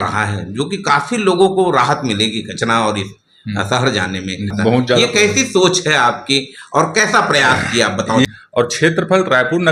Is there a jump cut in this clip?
yes; 2 cuts; at 4.5 s, 8.2 s

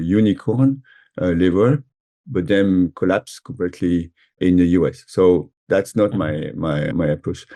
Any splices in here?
no; 0 cuts

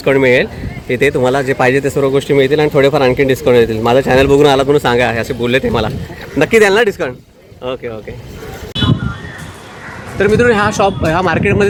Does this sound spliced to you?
no; 0 cuts

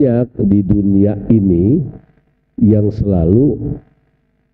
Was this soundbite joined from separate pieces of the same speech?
no; 0 cuts

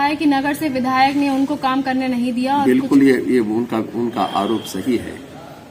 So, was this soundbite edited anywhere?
no; 0 cuts

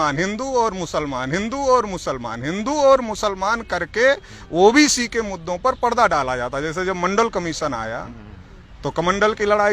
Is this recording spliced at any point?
no; 0 cuts

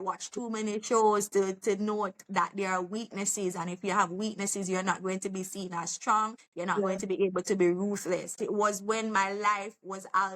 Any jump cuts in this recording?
yes; 2 cuts; at 6.4 s, 8.3 s

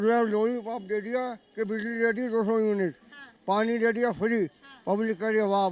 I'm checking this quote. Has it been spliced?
no; 0 cuts

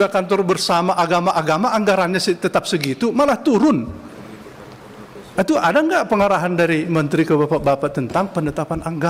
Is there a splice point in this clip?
no; 0 cuts

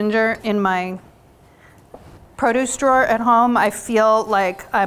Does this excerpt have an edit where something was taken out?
no; 0 cuts

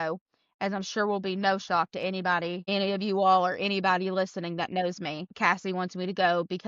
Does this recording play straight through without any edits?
no; 2 cuts; at 2.6 s, 5.3 s

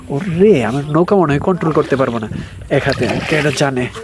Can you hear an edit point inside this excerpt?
no; 0 cuts

